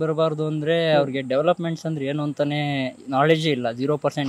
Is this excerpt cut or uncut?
uncut